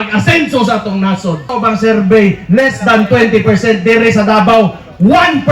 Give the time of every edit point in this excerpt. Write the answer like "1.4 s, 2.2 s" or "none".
1.5 s